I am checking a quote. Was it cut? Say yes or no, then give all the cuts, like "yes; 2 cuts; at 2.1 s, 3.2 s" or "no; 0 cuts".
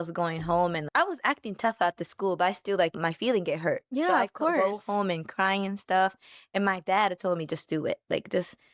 no; 0 cuts